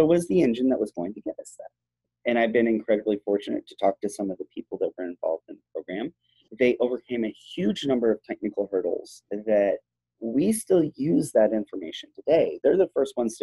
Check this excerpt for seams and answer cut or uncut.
cut